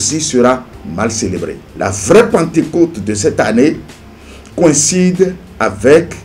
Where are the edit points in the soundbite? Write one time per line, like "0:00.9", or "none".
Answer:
0:01.9